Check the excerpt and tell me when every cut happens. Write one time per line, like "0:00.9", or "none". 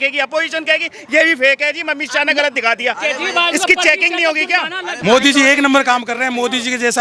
0:04.9

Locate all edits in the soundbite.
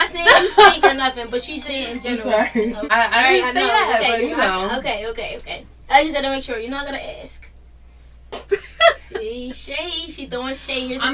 0:02.9

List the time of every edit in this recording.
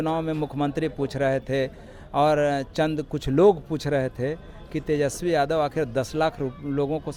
none

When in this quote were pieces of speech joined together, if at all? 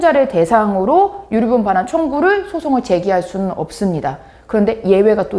none

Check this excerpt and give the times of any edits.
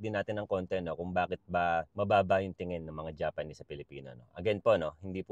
none

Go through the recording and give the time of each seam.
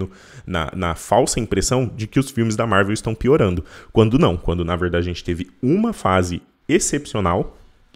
none

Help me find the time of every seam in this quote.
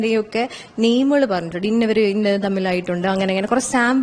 none

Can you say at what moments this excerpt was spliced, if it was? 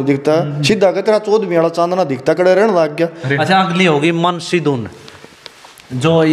0:03.3

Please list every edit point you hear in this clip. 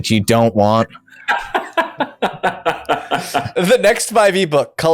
0:03.5

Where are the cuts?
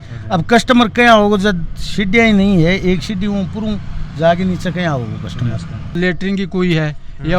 0:05.8

